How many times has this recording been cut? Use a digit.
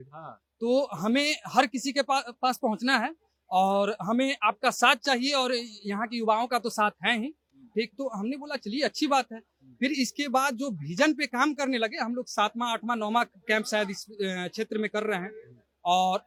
0